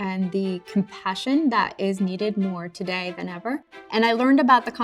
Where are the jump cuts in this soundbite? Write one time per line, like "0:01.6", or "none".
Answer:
0:03.8